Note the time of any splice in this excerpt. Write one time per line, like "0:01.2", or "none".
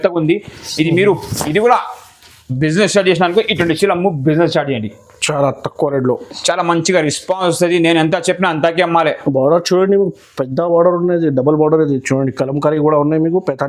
none